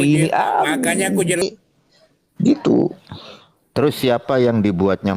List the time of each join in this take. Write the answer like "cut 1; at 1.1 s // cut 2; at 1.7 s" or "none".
cut 1; at 1.4 s